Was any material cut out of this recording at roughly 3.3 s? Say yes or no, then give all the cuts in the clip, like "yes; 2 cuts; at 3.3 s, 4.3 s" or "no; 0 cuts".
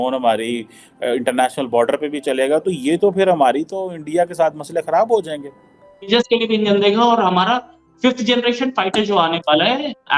no; 1 cut; at 6.1 s